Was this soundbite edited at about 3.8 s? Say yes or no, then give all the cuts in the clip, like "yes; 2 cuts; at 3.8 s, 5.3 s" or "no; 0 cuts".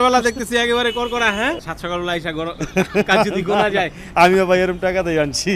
no; 1 cut; at 1.6 s